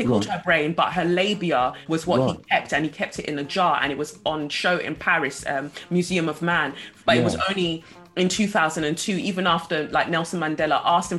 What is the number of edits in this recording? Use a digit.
2